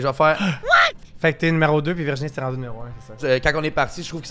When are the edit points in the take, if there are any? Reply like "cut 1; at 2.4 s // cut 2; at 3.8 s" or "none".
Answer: cut 1; at 1.0 s // cut 2; at 3.2 s